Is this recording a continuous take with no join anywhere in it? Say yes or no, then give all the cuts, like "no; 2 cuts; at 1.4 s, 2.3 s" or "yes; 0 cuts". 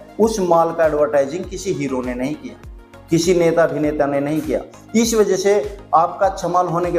yes; 0 cuts